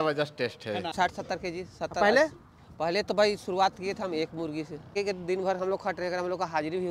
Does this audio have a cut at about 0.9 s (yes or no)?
yes